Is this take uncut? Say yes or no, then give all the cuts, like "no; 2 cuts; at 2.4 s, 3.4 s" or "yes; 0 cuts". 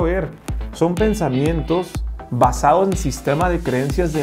yes; 0 cuts